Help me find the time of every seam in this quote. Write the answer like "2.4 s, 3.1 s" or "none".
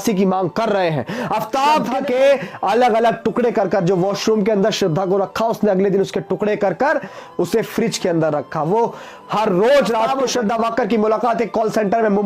1.9 s, 10.2 s